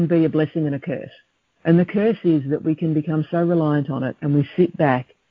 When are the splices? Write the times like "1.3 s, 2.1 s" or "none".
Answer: none

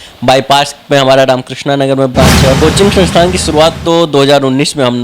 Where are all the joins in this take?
2.6 s

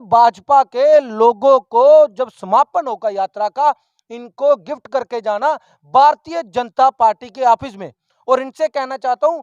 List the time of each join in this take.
none

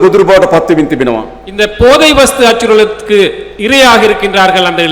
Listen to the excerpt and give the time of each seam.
none

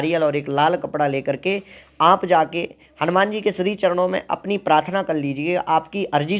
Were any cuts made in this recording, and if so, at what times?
none

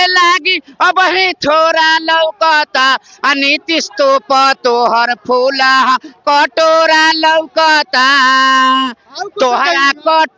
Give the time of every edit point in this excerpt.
none

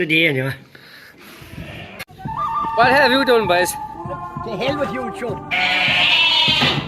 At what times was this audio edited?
2.2 s

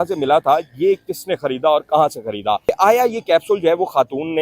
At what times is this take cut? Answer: 2.6 s

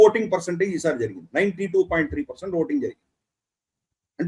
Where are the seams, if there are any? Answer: none

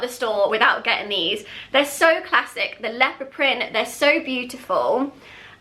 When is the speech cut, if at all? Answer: none

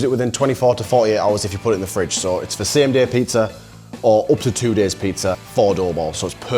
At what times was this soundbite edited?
5.4 s

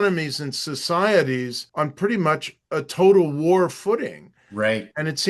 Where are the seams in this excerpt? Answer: 1.6 s

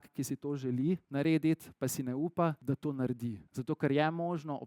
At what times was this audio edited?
1.1 s, 2.6 s, 3.5 s

